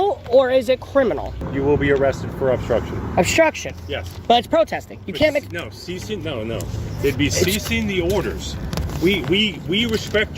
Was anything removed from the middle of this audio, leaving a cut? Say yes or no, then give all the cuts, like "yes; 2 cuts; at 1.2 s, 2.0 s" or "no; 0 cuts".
yes; 1 cut; at 1.4 s